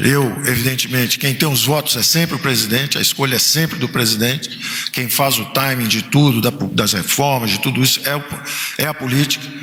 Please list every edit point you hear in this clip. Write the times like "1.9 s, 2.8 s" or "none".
none